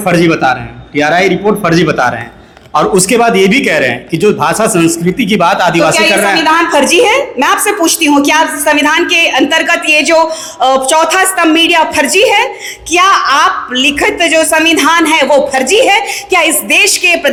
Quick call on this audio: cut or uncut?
uncut